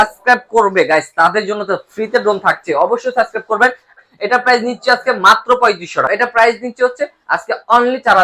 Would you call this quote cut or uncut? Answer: cut